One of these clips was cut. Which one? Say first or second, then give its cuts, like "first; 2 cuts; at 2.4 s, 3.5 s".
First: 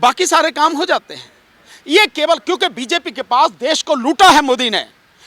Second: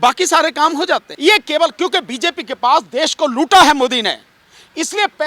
second; 1 cut; at 1.1 s